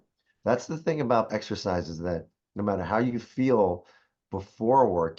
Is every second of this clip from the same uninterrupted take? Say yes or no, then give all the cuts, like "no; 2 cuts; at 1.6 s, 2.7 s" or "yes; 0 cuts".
no; 1 cut; at 1.3 s